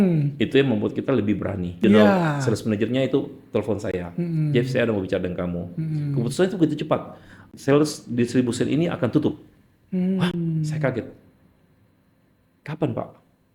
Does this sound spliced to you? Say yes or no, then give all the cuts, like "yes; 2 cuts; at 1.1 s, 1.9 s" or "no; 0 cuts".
yes; 1 cut; at 2.4 s